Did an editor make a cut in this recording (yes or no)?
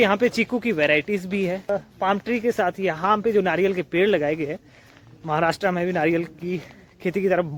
no